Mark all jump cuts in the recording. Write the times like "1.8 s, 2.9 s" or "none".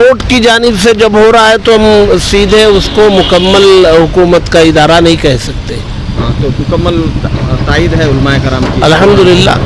none